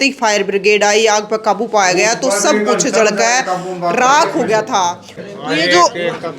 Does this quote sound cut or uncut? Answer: cut